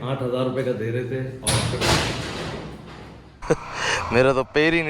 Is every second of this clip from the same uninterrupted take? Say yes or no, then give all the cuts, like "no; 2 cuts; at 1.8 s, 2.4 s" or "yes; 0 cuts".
no; 1 cut; at 3.4 s